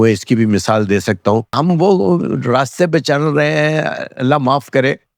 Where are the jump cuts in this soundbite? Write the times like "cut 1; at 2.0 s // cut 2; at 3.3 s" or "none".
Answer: cut 1; at 1.5 s